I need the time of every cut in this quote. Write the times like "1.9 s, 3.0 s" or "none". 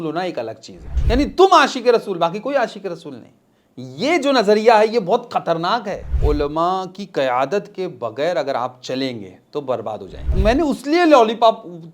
1.0 s, 6.1 s, 10.4 s